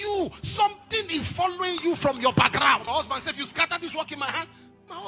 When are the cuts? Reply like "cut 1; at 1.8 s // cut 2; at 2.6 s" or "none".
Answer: cut 1; at 2.8 s